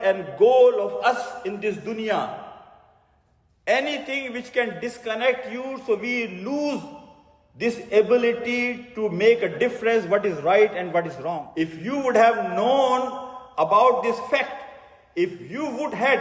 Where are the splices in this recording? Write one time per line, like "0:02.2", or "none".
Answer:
0:11.5